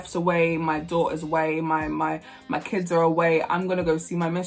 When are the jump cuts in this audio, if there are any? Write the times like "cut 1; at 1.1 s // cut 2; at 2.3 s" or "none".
none

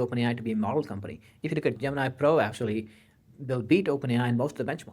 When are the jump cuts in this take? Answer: cut 1; at 1.8 s

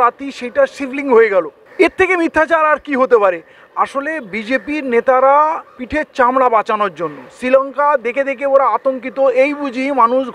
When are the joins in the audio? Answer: none

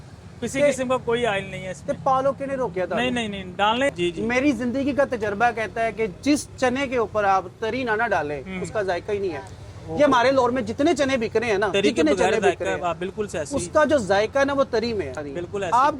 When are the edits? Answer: cut 1; at 3.9 s // cut 2; at 15.1 s

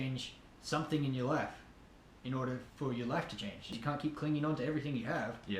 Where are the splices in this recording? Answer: cut 1; at 3.7 s

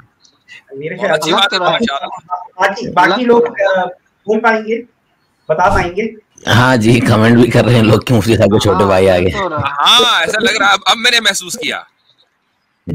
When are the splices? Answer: cut 1; at 6.3 s

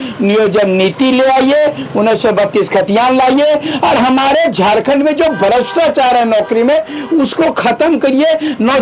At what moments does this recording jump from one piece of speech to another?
none

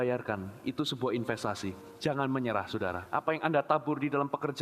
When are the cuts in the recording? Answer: cut 1; at 1.9 s // cut 2; at 3.0 s

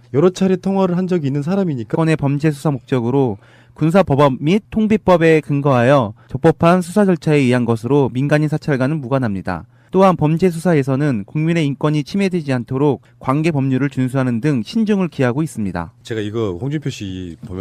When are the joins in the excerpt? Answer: none

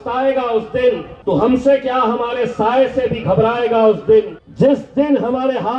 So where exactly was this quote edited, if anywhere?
cut 1; at 1.1 s // cut 2; at 4.4 s

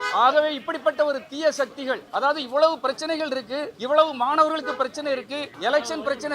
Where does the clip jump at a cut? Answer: cut 1; at 2.0 s // cut 2; at 3.7 s // cut 3; at 5.4 s

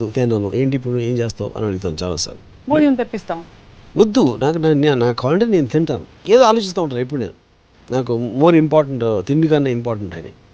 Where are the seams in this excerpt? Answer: cut 1; at 6.1 s

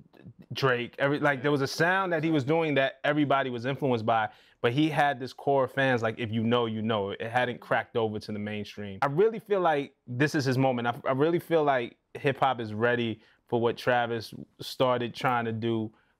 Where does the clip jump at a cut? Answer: cut 1; at 8.8 s

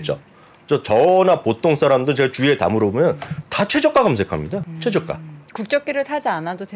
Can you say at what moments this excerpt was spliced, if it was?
cut 1; at 4.7 s

